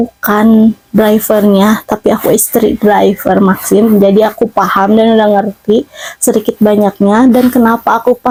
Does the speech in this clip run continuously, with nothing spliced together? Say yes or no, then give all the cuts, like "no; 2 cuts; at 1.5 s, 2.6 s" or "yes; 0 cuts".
yes; 0 cuts